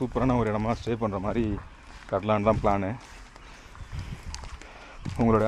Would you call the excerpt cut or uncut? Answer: uncut